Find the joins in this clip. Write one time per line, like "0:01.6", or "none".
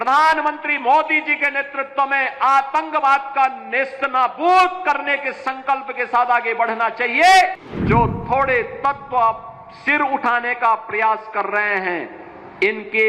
0:07.7